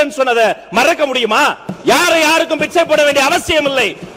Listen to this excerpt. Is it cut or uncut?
uncut